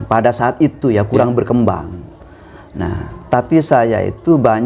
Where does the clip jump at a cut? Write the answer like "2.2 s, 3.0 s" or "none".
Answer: none